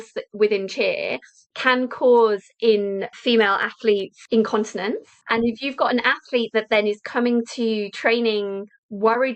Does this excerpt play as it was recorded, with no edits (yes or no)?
no